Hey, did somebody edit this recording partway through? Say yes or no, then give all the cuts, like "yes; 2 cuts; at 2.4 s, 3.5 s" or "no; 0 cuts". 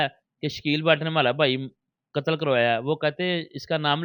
no; 0 cuts